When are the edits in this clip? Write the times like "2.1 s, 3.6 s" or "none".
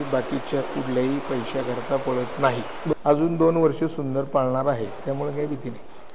2.9 s